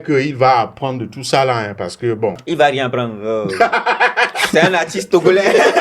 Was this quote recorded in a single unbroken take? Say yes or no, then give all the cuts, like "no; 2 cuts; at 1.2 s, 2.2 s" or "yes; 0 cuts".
no; 1 cut; at 2.4 s